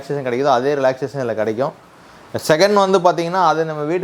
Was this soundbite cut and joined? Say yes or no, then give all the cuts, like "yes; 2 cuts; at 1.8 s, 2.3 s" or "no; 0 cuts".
no; 0 cuts